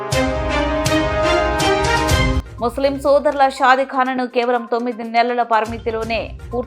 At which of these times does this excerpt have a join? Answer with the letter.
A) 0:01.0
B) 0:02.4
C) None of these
B